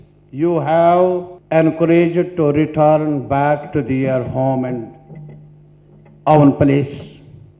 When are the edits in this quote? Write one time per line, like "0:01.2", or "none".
0:01.3